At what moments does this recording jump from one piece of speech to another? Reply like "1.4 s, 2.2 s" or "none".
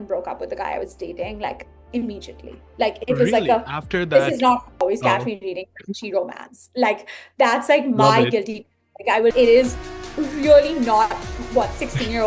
4.8 s, 9.3 s